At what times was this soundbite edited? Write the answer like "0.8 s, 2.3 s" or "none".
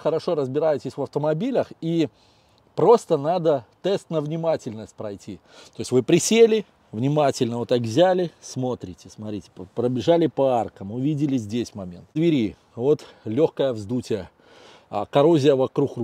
12.2 s